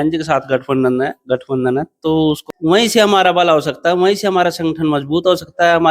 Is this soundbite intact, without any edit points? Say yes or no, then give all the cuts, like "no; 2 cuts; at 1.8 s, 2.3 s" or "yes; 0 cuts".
no; 1 cut; at 2.5 s